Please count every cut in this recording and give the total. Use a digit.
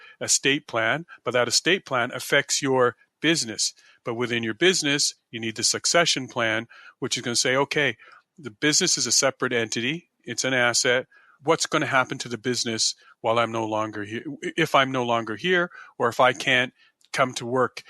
0